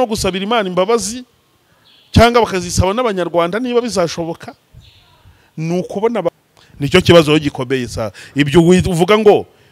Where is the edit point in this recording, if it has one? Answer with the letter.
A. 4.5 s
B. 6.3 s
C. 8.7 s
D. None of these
B